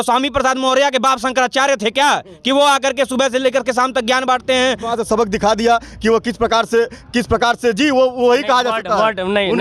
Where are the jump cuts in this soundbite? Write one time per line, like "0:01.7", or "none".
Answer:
0:04.9